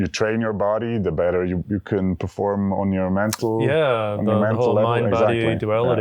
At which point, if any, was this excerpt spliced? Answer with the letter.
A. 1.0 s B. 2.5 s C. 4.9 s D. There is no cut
D